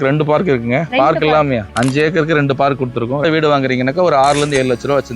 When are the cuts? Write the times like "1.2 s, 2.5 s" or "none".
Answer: 3.2 s